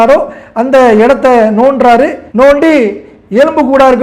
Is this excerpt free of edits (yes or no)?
no